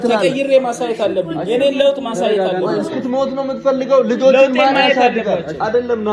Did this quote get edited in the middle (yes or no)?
no